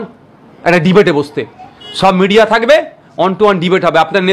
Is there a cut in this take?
no; 0 cuts

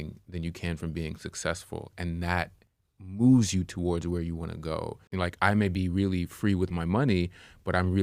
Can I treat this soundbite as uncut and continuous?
no; 1 cut; at 5.1 s

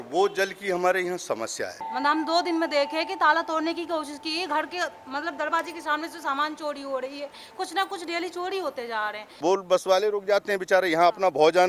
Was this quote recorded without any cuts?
no; 2 cuts; at 1.8 s, 9.2 s

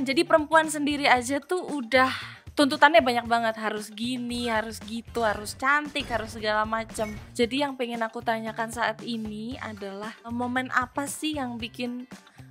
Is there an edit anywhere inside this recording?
yes; 2 cuts; at 7.2 s, 10.3 s

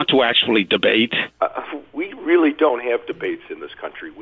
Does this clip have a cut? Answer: yes; 1 cut; at 1.2 s

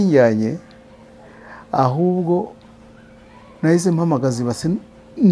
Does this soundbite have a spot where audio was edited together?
no; 0 cuts

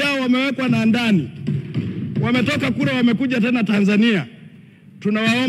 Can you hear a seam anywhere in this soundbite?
no; 0 cuts

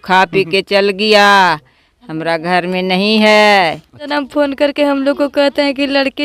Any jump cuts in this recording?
yes; 1 cut; at 4.1 s

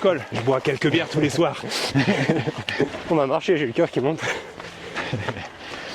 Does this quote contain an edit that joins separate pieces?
yes; 1 cut; at 3.0 s

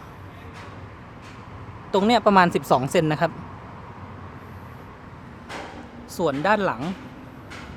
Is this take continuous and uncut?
yes; 0 cuts

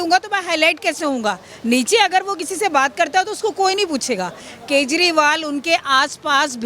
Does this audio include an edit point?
yes; 1 cut; at 4.4 s

